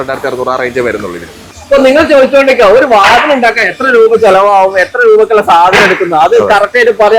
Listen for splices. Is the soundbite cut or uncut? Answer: cut